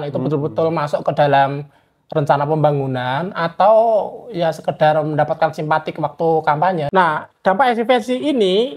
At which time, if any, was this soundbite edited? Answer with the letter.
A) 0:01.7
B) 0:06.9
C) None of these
B